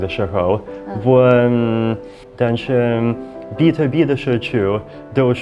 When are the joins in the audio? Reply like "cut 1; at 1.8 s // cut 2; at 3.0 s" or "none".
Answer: cut 1; at 2.2 s